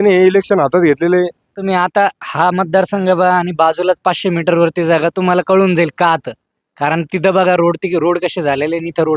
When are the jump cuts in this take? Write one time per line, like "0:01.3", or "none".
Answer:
0:01.5